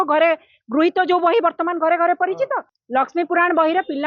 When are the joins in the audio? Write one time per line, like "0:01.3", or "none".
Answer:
0:02.7